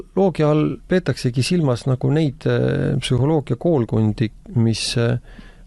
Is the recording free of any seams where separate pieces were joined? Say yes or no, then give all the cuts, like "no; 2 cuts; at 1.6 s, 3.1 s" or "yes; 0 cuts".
yes; 0 cuts